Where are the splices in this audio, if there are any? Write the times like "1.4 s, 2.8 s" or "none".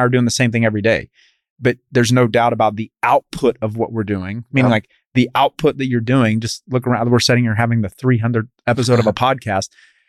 8.8 s